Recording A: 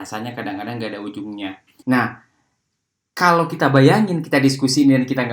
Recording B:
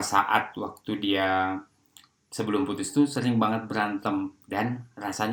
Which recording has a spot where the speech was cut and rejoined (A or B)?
A